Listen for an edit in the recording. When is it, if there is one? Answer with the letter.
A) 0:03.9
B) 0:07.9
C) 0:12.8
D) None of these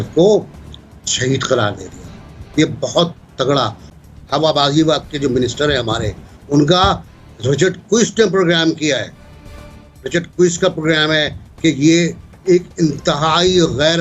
A